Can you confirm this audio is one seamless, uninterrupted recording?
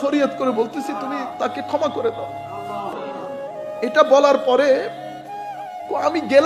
yes; 0 cuts

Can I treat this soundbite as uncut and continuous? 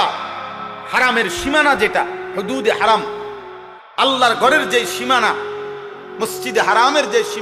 yes; 0 cuts

